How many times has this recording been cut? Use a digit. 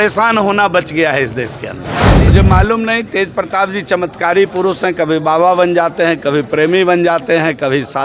1